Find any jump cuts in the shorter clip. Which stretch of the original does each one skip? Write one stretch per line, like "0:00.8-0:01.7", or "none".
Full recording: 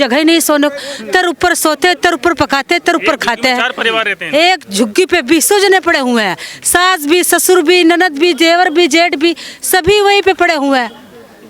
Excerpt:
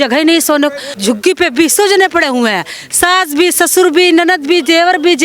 0:00.9-0:04.7